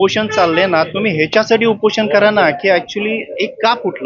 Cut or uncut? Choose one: uncut